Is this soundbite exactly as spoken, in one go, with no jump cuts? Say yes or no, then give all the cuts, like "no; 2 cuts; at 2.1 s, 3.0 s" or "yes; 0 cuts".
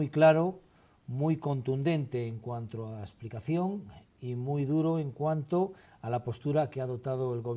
yes; 0 cuts